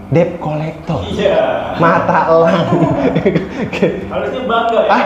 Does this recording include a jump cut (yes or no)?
no